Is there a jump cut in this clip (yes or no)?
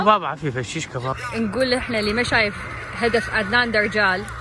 yes